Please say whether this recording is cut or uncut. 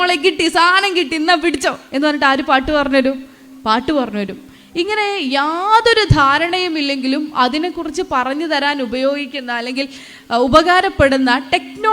uncut